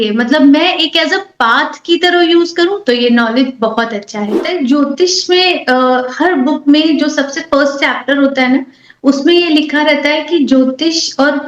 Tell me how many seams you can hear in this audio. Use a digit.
1